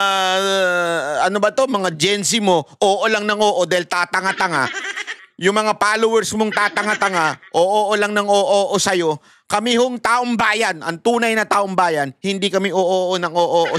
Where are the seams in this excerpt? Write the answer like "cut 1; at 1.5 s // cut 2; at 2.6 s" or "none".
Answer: none